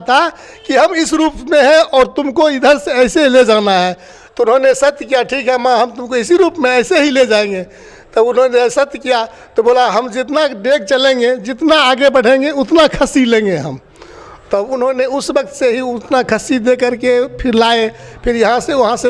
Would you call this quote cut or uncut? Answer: uncut